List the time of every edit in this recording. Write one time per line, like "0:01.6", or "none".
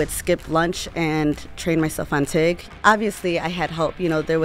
0:02.7